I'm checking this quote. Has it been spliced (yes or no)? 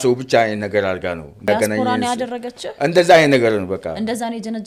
no